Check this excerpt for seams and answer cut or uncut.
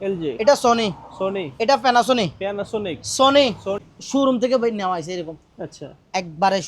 cut